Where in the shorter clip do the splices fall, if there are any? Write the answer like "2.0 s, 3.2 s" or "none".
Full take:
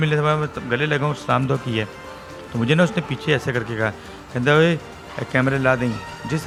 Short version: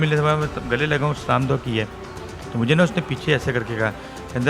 none

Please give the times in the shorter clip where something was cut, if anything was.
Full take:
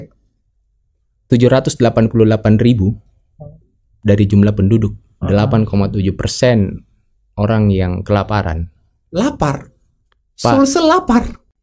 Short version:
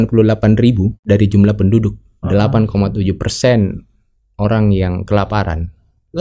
1.0 s

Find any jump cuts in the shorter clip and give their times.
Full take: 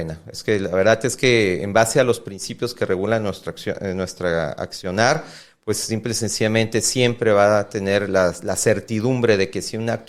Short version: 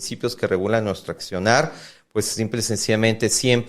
1.1 s

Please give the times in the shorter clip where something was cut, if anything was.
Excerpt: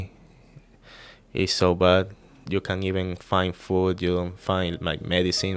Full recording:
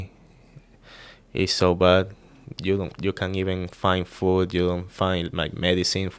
2.4 s

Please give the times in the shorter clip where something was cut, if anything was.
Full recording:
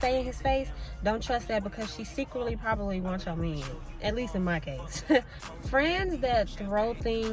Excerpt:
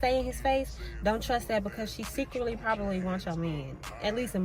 none

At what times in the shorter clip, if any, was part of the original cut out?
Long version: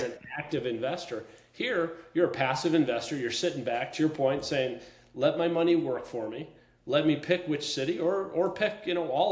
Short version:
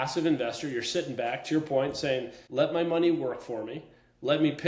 2.4 s

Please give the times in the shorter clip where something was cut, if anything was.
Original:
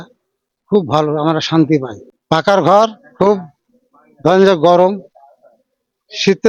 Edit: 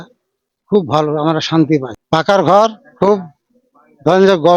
1.9 s

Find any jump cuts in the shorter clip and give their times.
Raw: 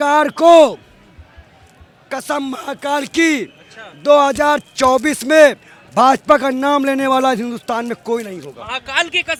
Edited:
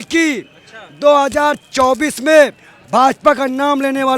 none

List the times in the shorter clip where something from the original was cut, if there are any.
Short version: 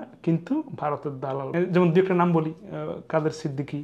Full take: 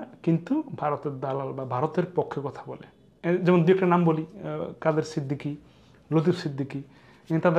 1.5 s

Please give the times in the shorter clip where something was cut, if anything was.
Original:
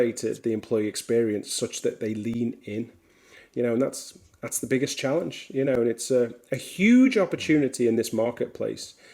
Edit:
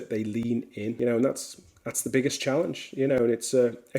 1.0 s

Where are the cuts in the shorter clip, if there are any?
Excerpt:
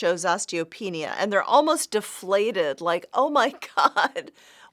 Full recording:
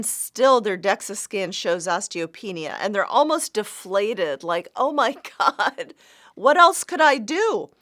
none

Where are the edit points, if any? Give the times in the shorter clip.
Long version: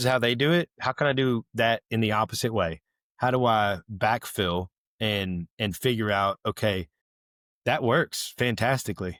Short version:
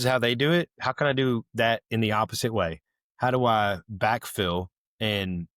none

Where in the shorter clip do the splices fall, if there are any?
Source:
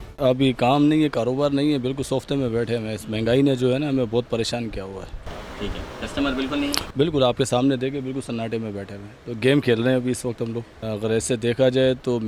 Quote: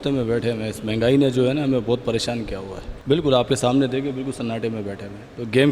2.9 s

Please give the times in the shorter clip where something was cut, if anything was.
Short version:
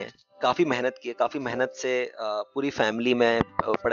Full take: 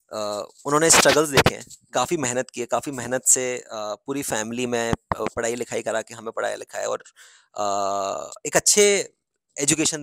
none

